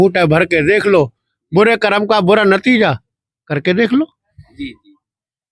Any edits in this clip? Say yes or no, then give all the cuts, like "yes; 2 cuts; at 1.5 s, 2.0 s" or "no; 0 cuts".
no; 0 cuts